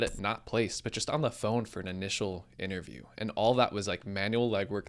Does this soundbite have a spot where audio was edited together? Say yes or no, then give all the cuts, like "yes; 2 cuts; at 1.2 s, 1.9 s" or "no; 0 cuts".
no; 0 cuts